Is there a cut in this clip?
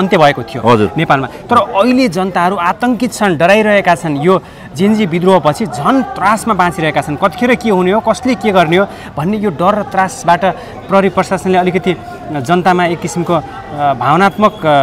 no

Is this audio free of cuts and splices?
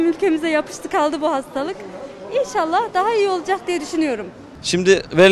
yes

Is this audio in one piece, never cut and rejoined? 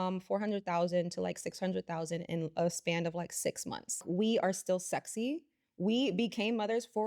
no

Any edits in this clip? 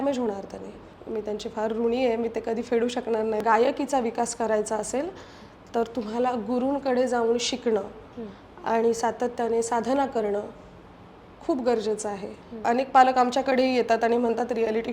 yes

